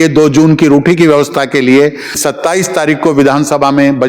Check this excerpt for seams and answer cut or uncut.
cut